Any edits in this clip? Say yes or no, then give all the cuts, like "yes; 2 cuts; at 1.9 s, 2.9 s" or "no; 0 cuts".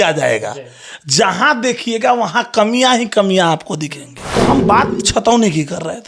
yes; 1 cut; at 4.3 s